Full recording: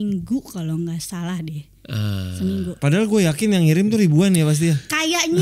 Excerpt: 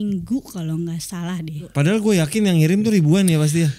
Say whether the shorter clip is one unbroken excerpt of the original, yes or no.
no